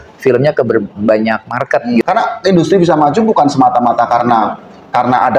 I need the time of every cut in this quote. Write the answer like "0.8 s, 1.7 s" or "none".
2.0 s